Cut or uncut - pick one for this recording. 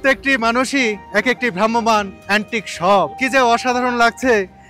cut